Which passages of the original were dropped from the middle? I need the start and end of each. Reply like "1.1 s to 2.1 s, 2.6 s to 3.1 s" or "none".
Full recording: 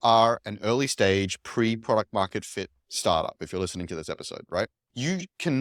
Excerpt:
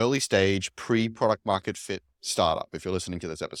none